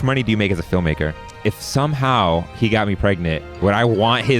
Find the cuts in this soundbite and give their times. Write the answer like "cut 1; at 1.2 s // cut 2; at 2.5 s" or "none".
cut 1; at 1.4 s